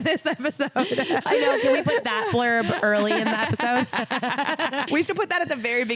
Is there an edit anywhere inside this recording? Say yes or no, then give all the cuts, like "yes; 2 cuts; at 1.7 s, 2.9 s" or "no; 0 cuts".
yes; 1 cut; at 4.9 s